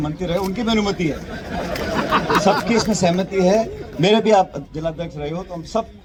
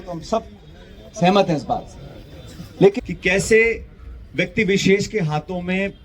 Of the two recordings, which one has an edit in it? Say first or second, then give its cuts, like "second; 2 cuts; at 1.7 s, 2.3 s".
second; 1 cut; at 3.0 s